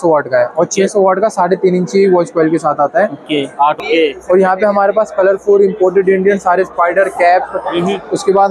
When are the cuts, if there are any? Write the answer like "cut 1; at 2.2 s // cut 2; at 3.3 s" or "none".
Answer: cut 1; at 3.8 s